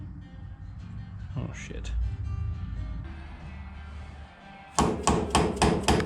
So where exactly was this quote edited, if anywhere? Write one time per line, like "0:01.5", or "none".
0:03.0